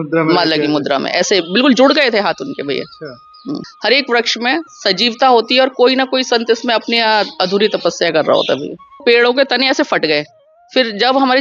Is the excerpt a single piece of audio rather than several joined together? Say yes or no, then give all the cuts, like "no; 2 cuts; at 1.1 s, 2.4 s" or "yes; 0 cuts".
no; 2 cuts; at 3.7 s, 9.0 s